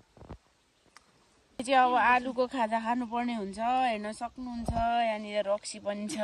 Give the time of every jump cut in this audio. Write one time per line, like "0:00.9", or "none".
0:01.6